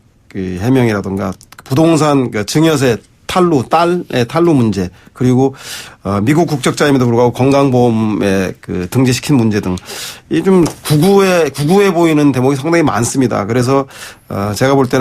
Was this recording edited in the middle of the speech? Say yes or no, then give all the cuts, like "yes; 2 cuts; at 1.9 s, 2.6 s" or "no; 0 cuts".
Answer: yes; 1 cut; at 11.7 s